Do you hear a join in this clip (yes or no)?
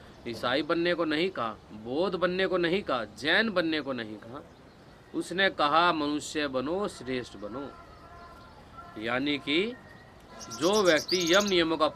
no